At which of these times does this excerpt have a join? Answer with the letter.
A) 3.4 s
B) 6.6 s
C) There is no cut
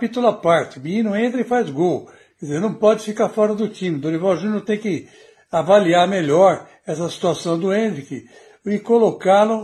C